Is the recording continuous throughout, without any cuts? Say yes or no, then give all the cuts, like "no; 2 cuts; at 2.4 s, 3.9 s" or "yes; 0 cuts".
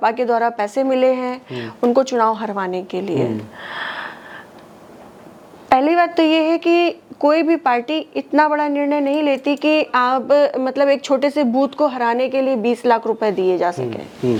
yes; 0 cuts